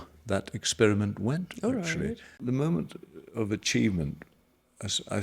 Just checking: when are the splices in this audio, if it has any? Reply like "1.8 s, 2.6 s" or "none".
2.4 s